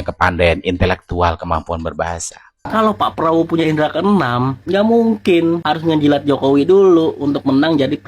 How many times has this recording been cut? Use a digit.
1